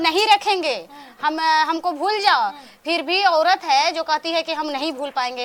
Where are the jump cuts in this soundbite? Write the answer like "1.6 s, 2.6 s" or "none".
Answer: none